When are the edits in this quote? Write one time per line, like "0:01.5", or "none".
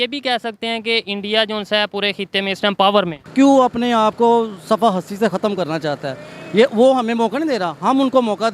0:03.2